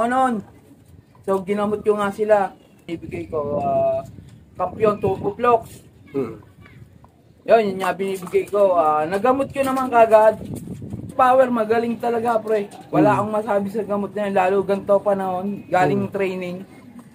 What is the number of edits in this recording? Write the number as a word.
two